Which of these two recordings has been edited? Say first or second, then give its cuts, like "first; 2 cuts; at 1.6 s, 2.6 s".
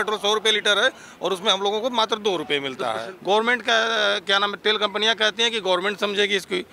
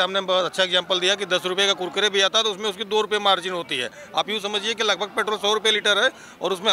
first; 1 cut; at 3.1 s